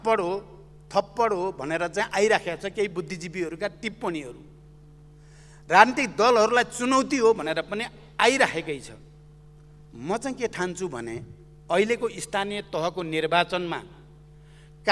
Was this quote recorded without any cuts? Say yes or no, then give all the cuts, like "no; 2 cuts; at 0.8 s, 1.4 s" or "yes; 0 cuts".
yes; 0 cuts